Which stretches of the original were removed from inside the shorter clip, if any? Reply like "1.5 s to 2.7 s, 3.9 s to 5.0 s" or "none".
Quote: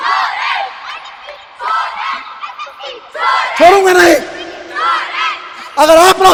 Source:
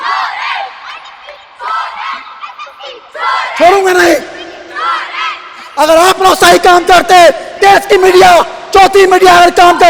none